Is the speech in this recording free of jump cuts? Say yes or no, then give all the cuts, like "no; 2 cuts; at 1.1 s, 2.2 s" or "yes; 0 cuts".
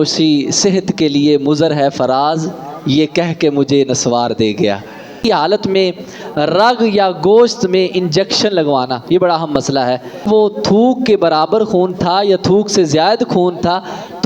no; 2 cuts; at 5.2 s, 10.2 s